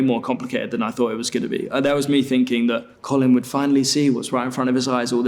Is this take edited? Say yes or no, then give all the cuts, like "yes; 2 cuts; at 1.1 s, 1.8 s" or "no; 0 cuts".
yes; 1 cut; at 2.9 s